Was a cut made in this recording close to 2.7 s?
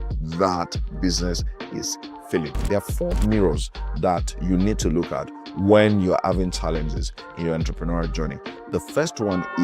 yes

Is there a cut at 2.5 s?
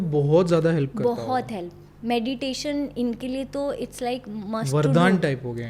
no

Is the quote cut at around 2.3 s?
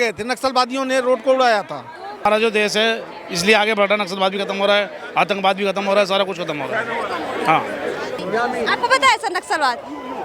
yes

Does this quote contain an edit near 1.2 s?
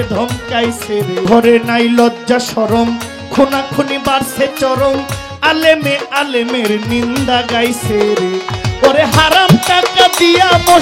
yes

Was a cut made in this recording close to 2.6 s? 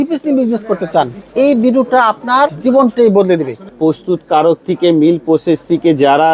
yes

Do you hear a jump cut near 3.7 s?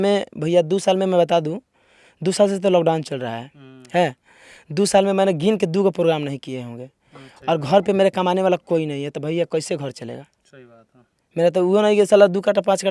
no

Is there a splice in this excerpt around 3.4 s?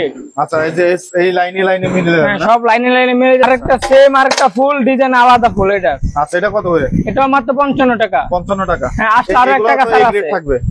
yes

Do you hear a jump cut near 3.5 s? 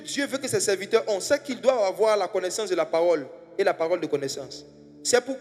no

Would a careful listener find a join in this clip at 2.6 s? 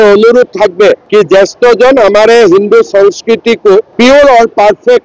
no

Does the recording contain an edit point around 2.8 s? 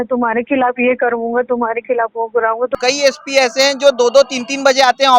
yes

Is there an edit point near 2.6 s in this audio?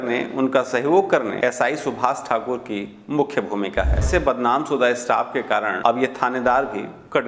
no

